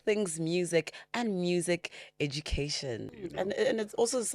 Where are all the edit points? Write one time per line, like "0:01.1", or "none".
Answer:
0:03.1